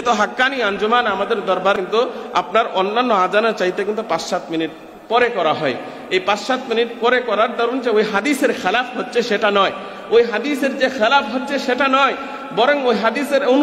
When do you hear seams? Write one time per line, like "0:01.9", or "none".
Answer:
0:01.8